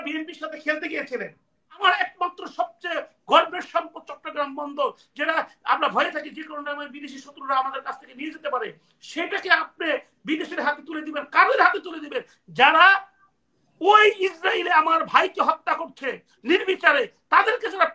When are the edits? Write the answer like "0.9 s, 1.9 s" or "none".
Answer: 1.8 s